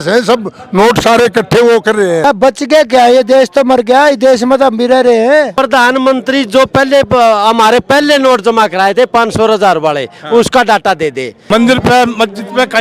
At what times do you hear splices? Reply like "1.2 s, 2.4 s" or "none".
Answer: 2.2 s, 5.5 s, 11.3 s